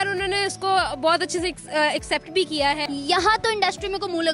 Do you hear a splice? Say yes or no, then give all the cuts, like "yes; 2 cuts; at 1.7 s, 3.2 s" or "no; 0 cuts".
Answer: yes; 1 cut; at 2.8 s